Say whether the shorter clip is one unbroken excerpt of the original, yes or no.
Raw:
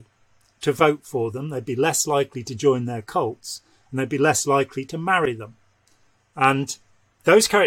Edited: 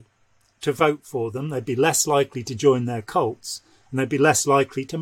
yes